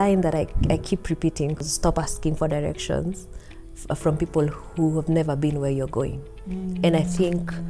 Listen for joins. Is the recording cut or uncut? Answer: cut